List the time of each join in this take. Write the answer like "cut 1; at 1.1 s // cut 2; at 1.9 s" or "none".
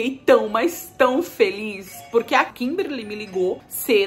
cut 1; at 2.5 s